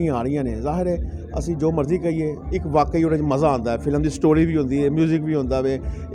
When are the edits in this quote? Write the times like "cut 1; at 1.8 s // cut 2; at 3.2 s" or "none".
none

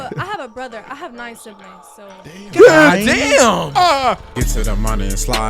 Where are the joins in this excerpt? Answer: cut 1; at 4.3 s

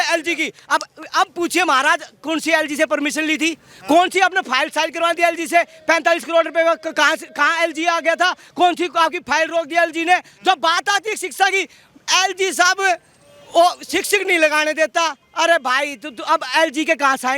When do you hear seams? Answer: none

